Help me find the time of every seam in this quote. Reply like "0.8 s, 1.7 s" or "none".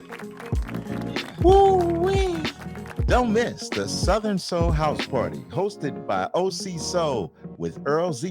1.4 s